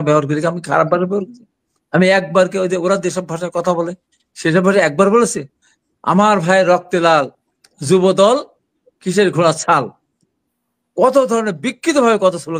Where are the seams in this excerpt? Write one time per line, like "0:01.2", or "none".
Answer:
none